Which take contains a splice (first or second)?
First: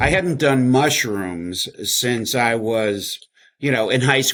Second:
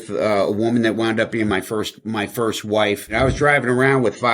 second